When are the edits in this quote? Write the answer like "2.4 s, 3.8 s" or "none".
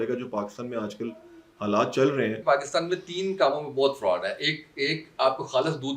2.4 s